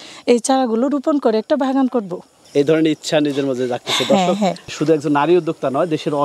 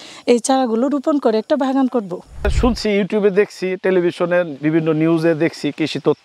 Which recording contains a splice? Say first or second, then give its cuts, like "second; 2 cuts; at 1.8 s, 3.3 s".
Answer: second; 1 cut; at 2.5 s